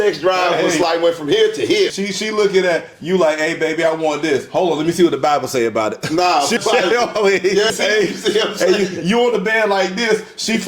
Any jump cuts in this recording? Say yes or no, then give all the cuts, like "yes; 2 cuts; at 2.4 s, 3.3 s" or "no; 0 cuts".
yes; 3 cuts; at 1.9 s, 6.6 s, 7.7 s